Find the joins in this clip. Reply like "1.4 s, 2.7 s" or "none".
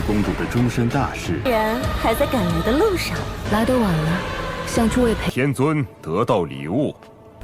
5.2 s